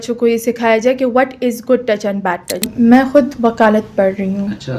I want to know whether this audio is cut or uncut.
cut